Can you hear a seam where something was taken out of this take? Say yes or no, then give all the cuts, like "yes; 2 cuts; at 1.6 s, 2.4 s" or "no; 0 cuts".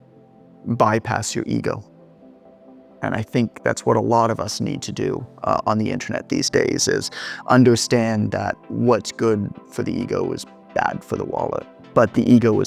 yes; 1 cut; at 11.8 s